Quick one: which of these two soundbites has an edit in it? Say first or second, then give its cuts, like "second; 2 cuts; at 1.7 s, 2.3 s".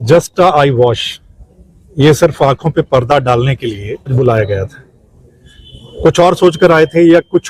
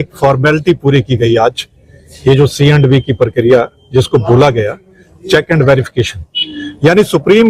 first; 1 cut; at 4.1 s